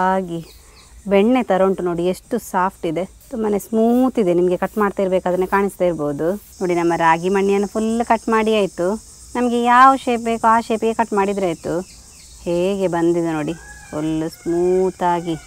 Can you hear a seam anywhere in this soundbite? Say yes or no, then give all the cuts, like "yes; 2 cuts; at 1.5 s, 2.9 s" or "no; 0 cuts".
yes; 2 cuts; at 3.2 s, 6.5 s